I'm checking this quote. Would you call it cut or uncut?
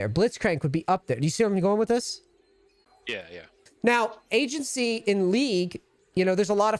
uncut